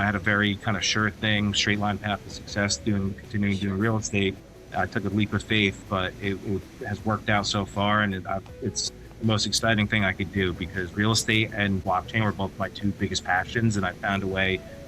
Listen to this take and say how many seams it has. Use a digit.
1